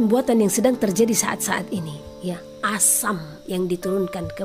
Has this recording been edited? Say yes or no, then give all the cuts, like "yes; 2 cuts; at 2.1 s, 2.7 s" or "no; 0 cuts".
no; 0 cuts